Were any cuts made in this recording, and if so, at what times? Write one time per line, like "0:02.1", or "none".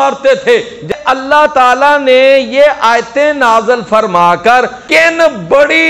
0:00.9
0:04.8

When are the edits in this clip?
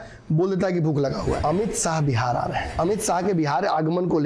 0:01.4
0:02.7

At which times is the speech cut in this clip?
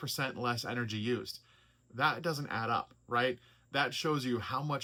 none

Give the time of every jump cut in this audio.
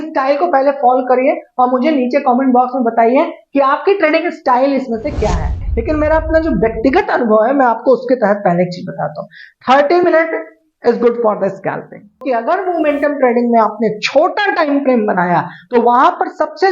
0:05.6
0:12.2

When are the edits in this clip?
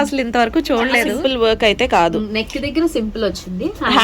0:01.1

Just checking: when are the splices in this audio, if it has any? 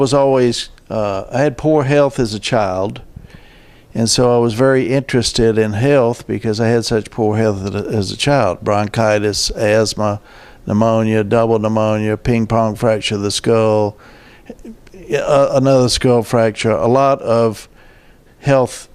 none

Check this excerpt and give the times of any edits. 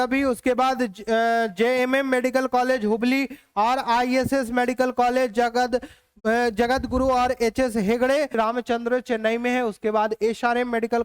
0:08.4

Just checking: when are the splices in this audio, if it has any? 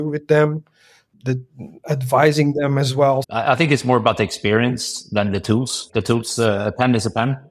0:01.1
0:03.3
0:05.8

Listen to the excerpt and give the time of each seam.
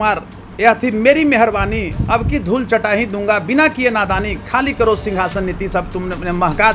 none

